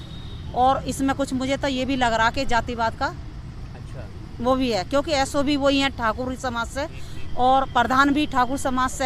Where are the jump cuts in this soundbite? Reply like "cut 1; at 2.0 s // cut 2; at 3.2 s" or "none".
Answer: none